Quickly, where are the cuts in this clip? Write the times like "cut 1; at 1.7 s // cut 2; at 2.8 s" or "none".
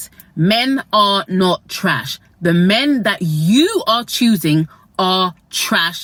none